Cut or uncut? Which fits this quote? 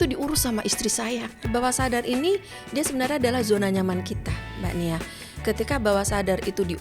cut